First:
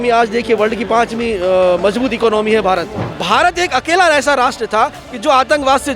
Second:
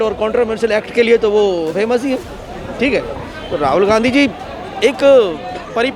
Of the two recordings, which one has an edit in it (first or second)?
first